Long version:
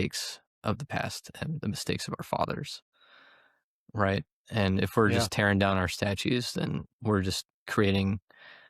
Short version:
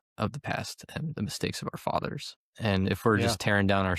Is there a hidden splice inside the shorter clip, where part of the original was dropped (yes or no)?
yes